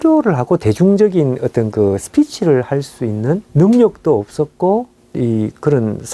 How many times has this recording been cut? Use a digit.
2